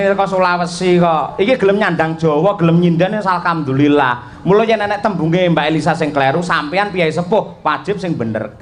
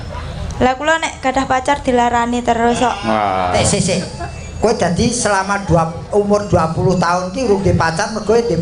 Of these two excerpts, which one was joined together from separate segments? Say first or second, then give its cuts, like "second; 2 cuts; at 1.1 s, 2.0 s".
second; 1 cut; at 3.6 s